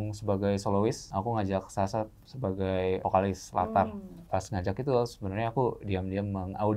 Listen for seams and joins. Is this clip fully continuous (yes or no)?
no